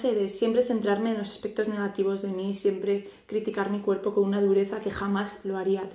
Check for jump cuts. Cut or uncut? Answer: cut